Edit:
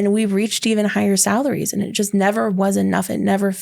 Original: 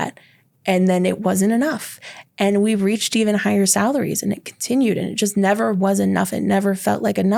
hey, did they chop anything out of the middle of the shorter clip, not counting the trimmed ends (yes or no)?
yes